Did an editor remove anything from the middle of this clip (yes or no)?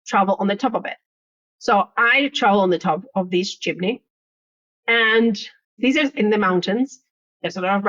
yes